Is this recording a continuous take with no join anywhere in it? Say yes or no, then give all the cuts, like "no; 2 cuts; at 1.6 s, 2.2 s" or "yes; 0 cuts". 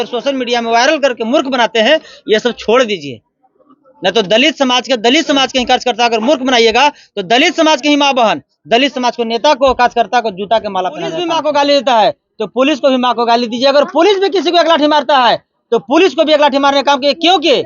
no; 1 cut; at 11.2 s